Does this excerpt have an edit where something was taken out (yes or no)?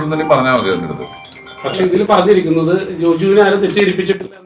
no